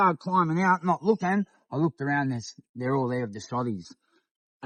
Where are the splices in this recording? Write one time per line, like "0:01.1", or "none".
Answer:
none